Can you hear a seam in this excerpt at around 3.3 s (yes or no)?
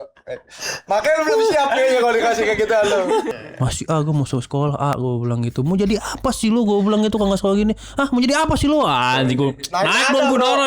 yes